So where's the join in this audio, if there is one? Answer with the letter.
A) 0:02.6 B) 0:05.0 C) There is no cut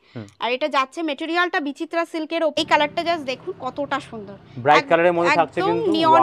A